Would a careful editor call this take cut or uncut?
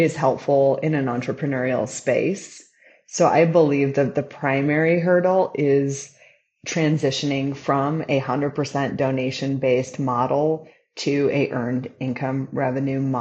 uncut